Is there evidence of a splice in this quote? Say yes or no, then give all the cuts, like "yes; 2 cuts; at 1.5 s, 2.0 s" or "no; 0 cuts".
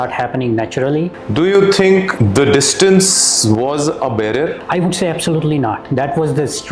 yes; 3 cuts; at 1.2 s, 2.1 s, 4.6 s